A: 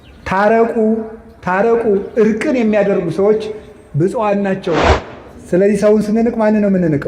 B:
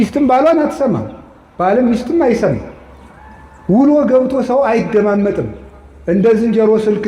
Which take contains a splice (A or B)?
A